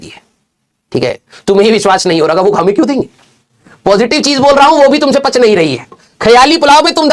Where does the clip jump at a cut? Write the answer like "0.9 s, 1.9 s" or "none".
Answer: none